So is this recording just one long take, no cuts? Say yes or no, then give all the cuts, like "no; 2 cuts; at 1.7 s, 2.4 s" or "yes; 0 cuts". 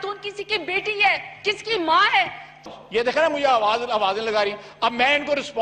no; 1 cut; at 2.6 s